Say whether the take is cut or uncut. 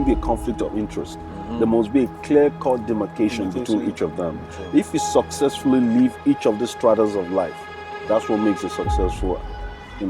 uncut